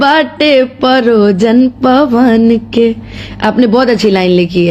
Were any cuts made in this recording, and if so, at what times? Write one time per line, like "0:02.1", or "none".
none